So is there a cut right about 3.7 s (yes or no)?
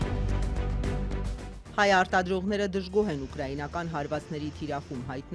no